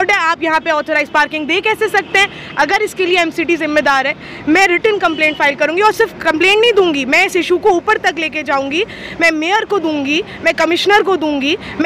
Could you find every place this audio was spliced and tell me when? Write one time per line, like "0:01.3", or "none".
none